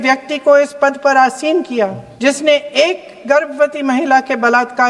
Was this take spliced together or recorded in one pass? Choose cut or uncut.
cut